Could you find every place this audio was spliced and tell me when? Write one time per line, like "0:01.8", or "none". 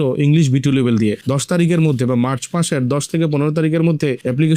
0:01.2